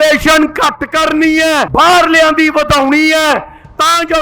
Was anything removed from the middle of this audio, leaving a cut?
yes; 1 cut; at 1.7 s

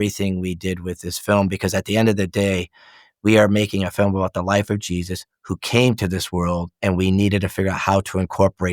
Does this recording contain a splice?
no; 0 cuts

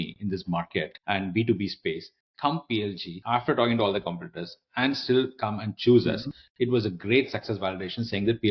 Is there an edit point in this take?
yes; 2 cuts; at 0.9 s, 3.1 s

